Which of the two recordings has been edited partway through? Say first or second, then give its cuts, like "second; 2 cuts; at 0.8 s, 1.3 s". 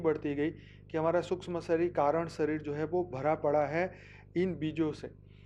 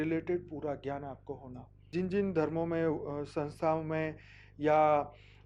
second; 1 cut; at 1.8 s